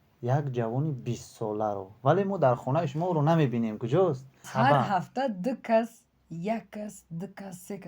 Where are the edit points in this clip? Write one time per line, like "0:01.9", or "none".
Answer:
0:04.4